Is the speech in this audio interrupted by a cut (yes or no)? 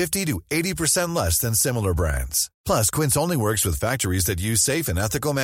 no